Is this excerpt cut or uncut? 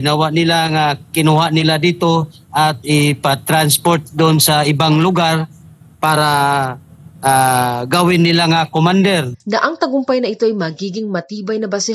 cut